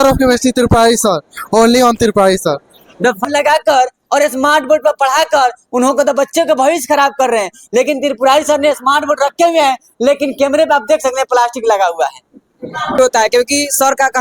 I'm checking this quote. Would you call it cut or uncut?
cut